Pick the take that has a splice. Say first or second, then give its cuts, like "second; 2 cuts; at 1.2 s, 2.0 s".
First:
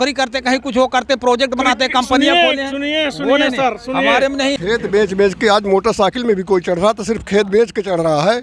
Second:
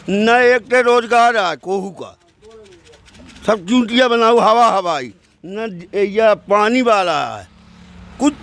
first; 1 cut; at 4.6 s